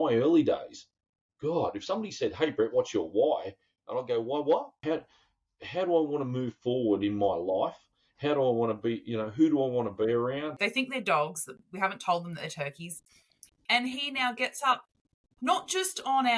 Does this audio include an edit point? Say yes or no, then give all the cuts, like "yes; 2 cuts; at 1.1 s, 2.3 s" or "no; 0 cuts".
yes; 2 cuts; at 4.7 s, 10.6 s